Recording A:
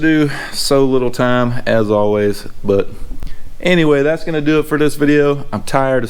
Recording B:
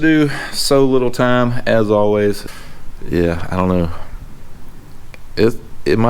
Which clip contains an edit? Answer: B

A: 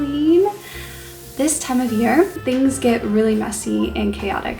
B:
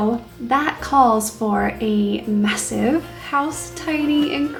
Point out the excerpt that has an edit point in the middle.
A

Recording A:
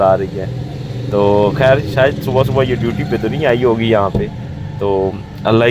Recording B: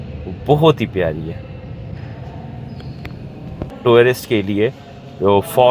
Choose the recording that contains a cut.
B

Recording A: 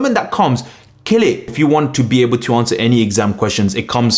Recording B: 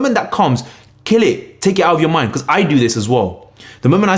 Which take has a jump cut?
A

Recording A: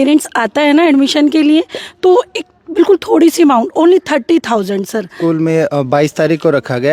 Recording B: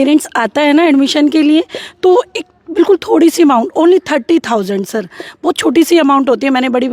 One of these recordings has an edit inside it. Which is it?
A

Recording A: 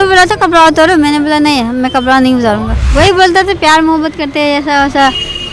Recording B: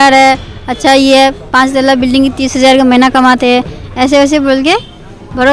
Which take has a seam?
A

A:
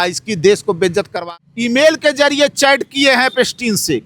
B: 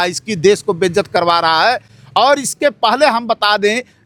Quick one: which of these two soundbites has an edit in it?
A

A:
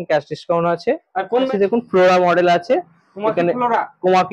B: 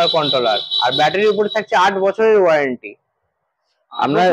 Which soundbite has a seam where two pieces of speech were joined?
A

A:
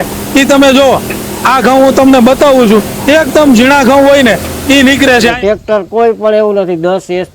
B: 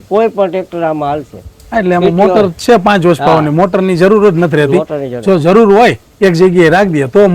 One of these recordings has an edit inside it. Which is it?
A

